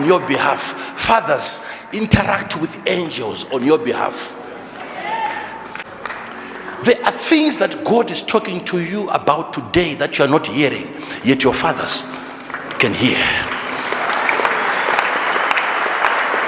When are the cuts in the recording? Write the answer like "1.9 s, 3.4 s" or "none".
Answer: 5.9 s